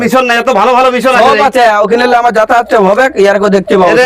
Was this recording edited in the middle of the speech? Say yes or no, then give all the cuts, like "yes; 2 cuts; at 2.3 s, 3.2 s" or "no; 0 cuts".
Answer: no; 0 cuts